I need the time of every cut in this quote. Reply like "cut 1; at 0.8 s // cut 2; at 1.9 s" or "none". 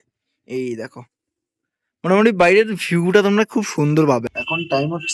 cut 1; at 4.2 s